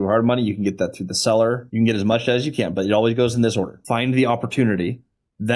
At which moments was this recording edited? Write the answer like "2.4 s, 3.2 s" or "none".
1.6 s, 3.8 s